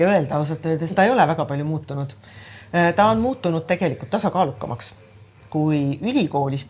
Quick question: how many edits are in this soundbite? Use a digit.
2